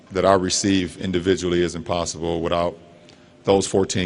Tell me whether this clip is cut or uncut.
uncut